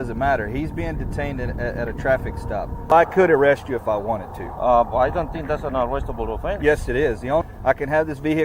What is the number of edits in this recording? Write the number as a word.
two